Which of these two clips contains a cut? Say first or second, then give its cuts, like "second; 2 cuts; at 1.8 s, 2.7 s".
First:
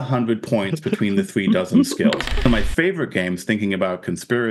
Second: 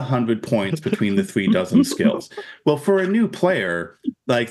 first; 1 cut; at 2.4 s